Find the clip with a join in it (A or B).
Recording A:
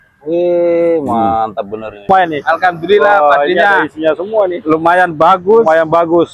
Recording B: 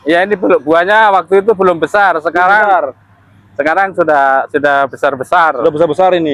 A